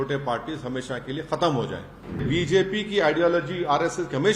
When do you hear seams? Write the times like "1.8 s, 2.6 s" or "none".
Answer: 2.2 s